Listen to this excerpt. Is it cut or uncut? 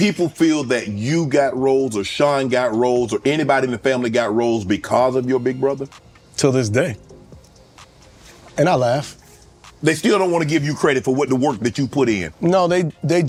uncut